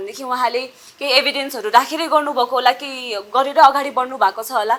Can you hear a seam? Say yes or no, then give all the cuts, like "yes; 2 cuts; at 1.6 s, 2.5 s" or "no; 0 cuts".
no; 0 cuts